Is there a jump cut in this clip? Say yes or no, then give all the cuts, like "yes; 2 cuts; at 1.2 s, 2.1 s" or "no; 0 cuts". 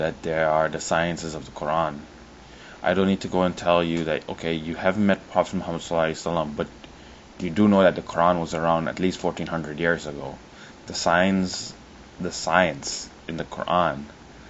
yes; 1 cut; at 2.8 s